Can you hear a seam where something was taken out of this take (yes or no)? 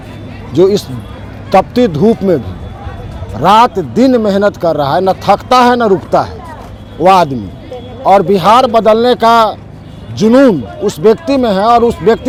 no